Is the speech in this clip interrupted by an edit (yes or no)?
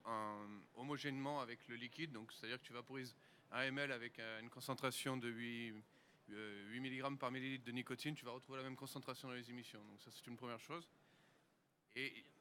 yes